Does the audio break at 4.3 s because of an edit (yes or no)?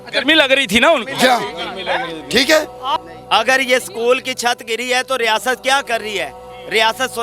no